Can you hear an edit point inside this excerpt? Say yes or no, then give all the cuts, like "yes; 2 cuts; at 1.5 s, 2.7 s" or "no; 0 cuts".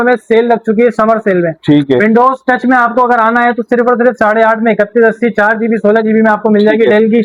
no; 0 cuts